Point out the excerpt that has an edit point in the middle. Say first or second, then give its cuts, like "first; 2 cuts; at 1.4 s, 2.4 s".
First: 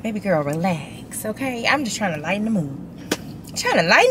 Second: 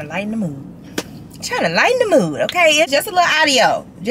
second; 1 cut; at 2.9 s